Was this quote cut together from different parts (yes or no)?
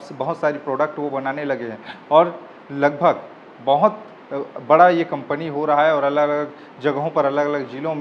no